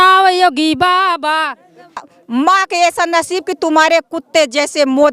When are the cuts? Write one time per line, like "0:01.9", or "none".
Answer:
0:02.0